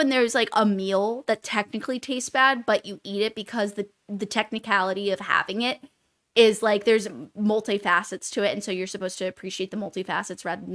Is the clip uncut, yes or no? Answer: yes